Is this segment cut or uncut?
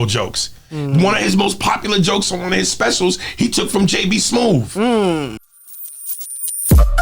cut